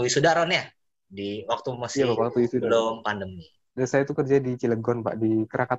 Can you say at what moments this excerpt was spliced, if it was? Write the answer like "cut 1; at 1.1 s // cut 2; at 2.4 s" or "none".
cut 1; at 3.7 s